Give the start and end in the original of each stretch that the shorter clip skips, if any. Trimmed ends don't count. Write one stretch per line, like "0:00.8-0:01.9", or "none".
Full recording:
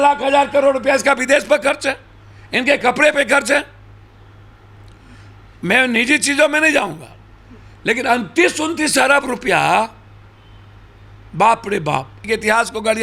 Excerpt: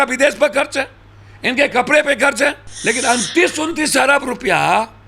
0:03.8-0:07.7

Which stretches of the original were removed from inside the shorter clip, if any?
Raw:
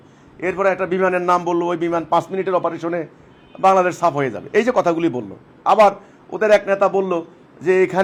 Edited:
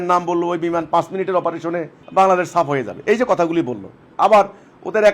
0:03.1-0:03.4

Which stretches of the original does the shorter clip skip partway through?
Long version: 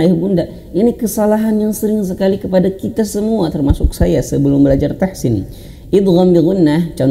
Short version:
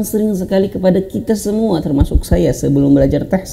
none

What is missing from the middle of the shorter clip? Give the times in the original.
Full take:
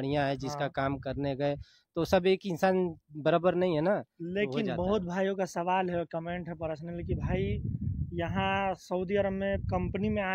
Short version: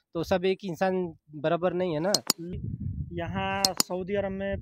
0:04.3-0:07.5

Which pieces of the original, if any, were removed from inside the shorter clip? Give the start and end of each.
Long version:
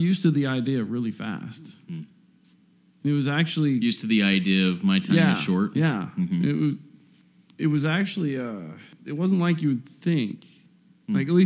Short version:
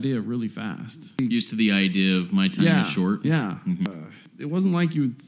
0:01.8-0:03.7
0:06.4-0:08.5

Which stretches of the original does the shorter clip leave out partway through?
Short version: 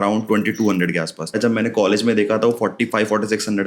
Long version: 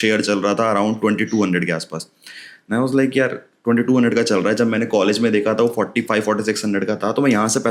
0:02.1-0:04.5

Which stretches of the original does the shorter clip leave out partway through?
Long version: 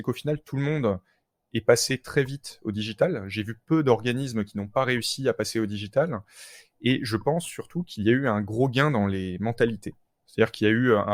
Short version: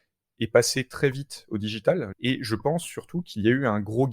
0:03.3-0:06.7

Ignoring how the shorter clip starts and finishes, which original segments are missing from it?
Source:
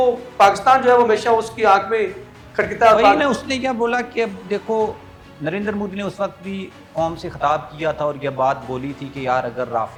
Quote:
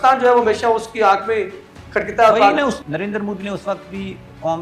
0:03.4-0:05.3

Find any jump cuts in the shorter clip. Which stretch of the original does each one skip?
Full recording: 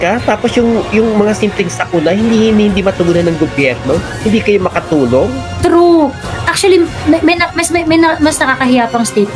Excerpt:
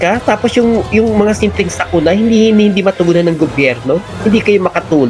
none

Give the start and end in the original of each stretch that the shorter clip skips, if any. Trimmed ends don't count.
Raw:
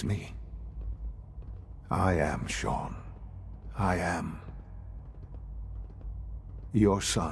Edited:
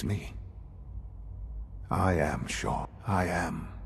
0:02.9-0:03.7

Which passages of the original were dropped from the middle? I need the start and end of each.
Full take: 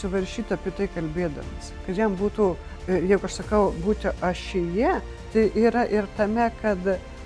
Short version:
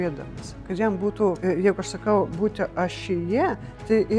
0:02.6-0:02.8

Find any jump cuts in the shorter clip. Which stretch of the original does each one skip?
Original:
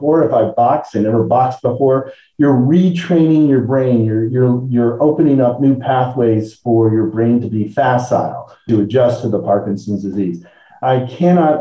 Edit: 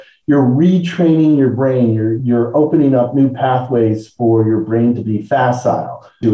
0:04.3-0:04.6

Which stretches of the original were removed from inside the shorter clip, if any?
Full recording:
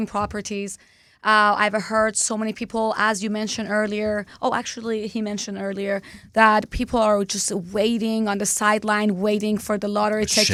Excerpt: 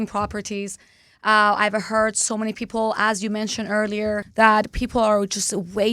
0:04.3-0:06.2

